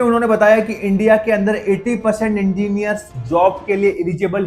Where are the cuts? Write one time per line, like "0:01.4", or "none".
none